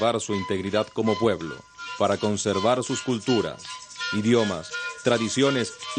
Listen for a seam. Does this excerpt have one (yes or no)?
yes